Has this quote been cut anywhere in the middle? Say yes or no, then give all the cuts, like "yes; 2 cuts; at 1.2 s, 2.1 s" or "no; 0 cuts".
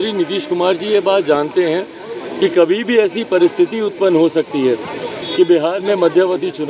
no; 0 cuts